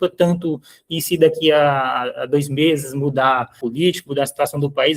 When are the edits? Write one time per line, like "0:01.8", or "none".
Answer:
0:03.6

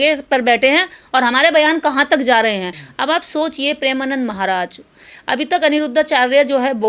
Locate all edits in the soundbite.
0:02.7

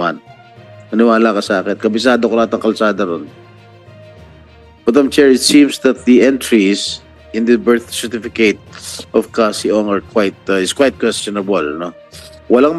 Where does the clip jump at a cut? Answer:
none

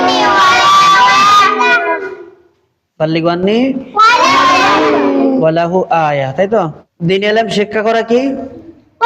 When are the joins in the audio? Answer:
none

